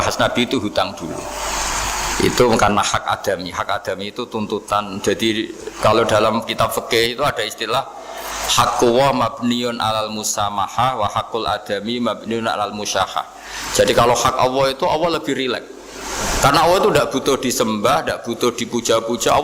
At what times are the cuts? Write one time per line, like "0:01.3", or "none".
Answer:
none